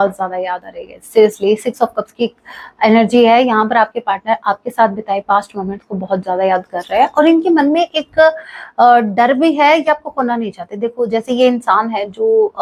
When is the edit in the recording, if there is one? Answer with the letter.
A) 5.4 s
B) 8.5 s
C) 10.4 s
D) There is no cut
D